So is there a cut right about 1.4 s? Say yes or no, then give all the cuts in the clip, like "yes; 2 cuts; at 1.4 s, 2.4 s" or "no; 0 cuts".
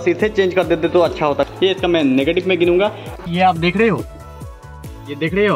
yes; 2 cuts; at 1.4 s, 3.2 s